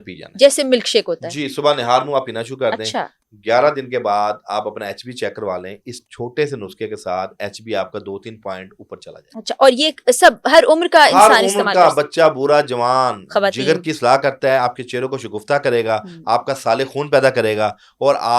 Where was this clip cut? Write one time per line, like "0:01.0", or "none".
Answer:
none